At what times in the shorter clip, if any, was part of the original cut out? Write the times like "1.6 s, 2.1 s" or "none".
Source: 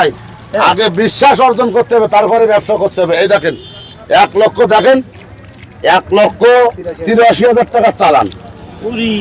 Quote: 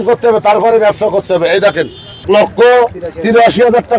2.2 s